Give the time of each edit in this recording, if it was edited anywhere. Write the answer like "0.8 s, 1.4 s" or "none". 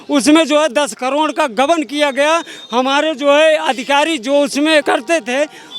4.8 s